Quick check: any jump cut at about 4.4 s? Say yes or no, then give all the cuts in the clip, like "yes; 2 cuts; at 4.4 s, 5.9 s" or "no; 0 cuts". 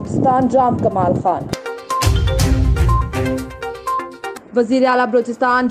yes; 2 cuts; at 1.5 s, 4.4 s